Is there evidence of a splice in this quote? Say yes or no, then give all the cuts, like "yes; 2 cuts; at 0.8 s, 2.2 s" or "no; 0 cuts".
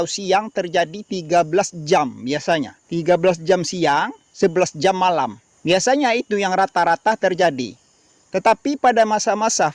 yes; 3 cuts; at 2.8 s, 4.2 s, 5.5 s